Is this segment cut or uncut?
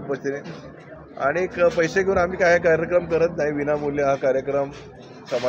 uncut